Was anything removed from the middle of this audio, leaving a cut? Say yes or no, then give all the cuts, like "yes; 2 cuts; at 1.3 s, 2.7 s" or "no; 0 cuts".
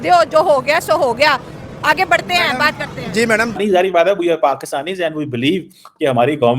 yes; 1 cut; at 3.6 s